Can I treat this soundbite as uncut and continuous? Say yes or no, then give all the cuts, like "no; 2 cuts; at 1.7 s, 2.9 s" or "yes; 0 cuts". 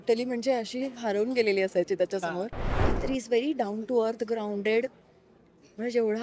no; 1 cut; at 2.8 s